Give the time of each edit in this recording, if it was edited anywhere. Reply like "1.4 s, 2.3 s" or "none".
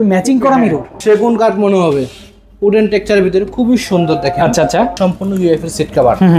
0.9 s, 4.9 s